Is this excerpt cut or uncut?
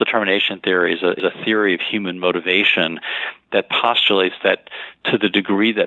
cut